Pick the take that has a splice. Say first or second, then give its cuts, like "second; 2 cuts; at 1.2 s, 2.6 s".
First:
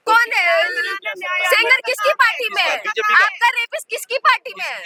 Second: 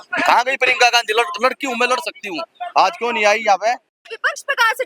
second; 1 cut; at 3.9 s